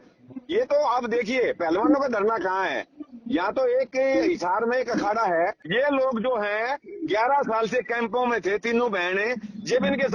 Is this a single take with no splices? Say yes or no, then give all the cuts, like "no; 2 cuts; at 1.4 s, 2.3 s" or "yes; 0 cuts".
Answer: no; 1 cut; at 5.6 s